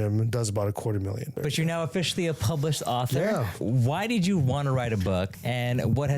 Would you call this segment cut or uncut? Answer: cut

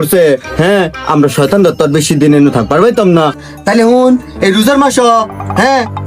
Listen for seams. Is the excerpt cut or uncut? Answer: cut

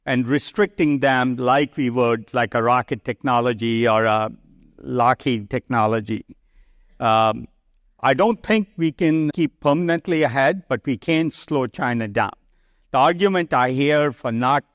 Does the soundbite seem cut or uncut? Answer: uncut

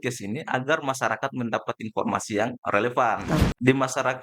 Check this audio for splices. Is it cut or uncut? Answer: cut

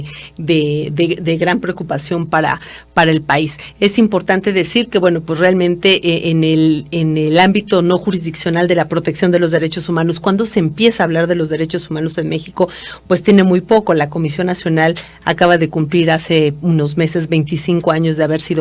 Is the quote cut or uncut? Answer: cut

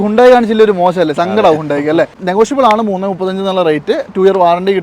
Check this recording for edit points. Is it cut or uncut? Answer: cut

